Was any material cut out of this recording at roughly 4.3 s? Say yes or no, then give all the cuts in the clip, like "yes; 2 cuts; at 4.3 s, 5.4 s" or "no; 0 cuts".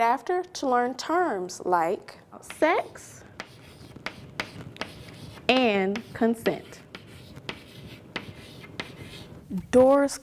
no; 1 cut; at 9.3 s